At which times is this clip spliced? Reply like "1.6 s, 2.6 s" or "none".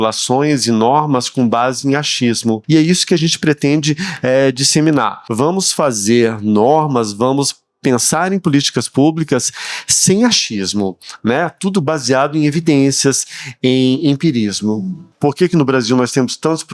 2.6 s, 5.2 s, 15.0 s